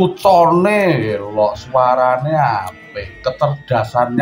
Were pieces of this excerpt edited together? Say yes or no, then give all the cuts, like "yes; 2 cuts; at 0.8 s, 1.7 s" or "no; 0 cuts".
no; 0 cuts